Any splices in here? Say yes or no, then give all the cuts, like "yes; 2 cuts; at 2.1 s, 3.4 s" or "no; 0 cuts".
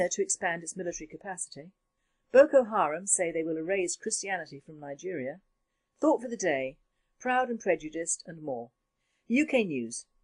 no; 0 cuts